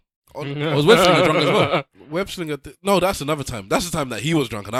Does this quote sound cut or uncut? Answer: uncut